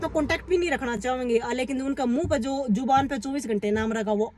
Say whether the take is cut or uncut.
uncut